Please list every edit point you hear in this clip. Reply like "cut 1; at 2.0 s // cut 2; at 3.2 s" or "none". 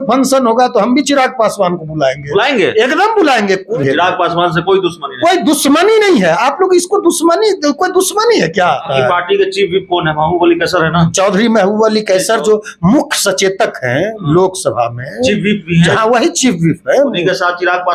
cut 1; at 3.7 s // cut 2; at 8.9 s